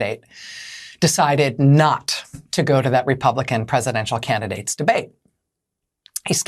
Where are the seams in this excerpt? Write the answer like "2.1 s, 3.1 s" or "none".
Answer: none

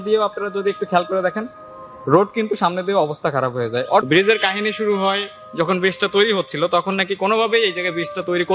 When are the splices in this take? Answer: 4.0 s

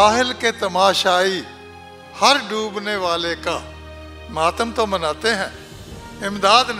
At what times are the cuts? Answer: none

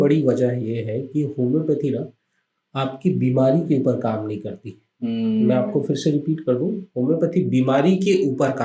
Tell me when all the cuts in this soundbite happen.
none

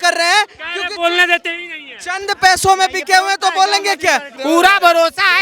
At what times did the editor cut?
4.3 s

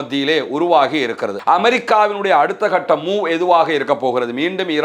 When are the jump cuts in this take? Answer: 1.3 s

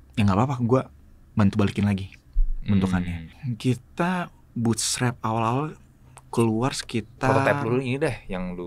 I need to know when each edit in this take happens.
3.3 s

